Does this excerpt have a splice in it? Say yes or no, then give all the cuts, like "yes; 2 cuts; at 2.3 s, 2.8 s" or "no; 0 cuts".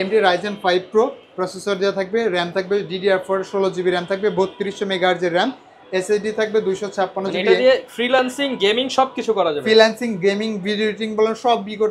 no; 0 cuts